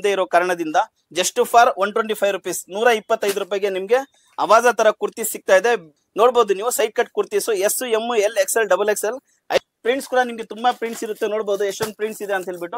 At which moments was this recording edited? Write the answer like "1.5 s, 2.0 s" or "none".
1.0 s, 5.9 s, 9.6 s